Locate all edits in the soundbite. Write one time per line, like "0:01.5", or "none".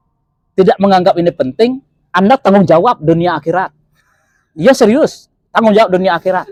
none

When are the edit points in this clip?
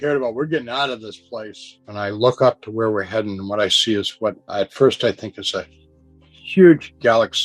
0:01.8

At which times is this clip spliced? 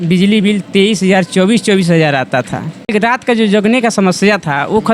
0:02.9

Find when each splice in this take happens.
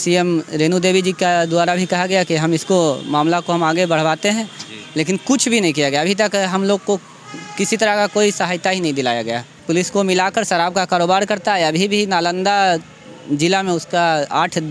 0:09.6

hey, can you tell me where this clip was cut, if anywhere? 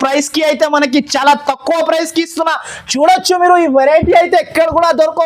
none

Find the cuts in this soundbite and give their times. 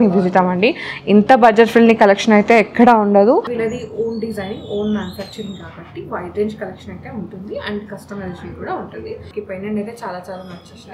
0:03.5
0:09.3

